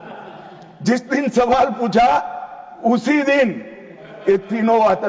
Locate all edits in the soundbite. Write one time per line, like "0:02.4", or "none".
none